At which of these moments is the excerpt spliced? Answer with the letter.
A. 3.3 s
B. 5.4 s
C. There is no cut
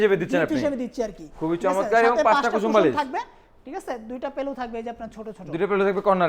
C